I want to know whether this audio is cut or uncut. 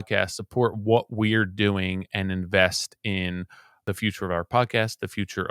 cut